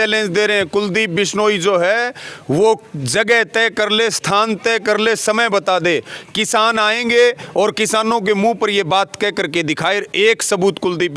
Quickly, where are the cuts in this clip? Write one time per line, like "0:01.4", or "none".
none